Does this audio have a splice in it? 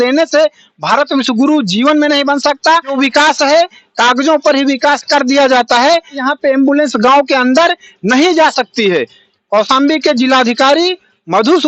yes; 3 cuts; at 2.9 s, 6.2 s, 9.2 s

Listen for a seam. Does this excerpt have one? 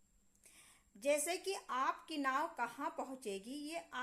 no; 0 cuts

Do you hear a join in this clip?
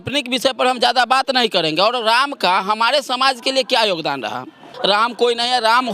yes; 1 cut; at 4.7 s

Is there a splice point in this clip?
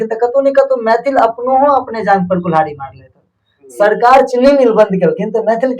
no; 0 cuts

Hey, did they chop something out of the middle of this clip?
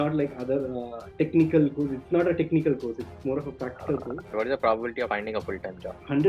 yes; 2 cuts; at 4.3 s, 5.1 s

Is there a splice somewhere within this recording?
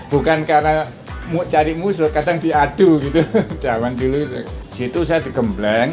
yes; 1 cut; at 4.6 s

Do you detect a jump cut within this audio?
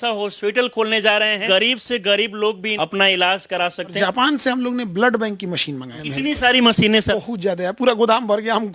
yes; 5 cuts; at 1.4 s, 2.7 s, 3.9 s, 6.0 s, 7.1 s

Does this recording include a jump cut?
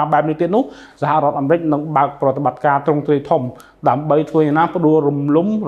no; 0 cuts

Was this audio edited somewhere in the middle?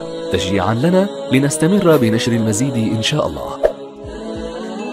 yes; 1 cut; at 3.7 s

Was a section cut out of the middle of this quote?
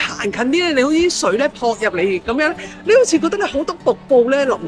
no; 0 cuts

